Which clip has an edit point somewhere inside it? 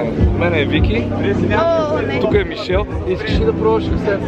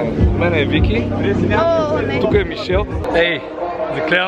second; 1 cut; at 3.0 s

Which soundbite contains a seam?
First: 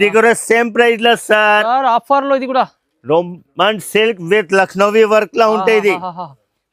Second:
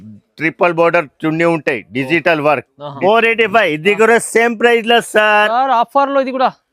second; 1 cut; at 2.9 s

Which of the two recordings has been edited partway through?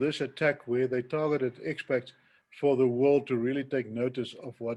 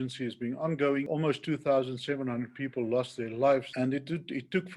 second; 2 cuts; at 1.1 s, 3.7 s

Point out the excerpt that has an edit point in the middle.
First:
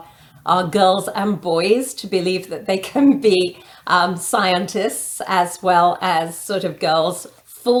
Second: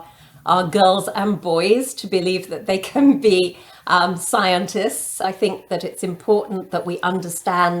second; 1 cut; at 5.2 s

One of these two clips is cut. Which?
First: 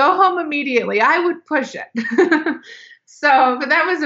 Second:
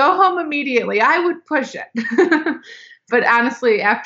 second; 1 cut; at 3.0 s

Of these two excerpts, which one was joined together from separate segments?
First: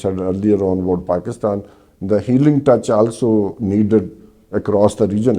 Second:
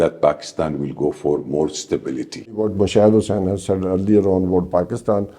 second; 1 cut; at 2.7 s

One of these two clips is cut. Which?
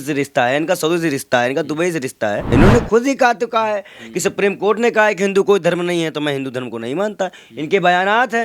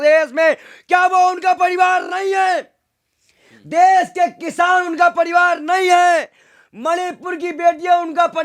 first; 1 cut; at 2.5 s

